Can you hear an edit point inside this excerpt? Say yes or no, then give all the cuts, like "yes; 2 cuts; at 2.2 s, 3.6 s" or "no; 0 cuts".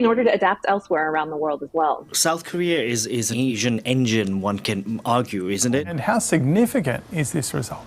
yes; 3 cuts; at 2.2 s, 3.4 s, 5.9 s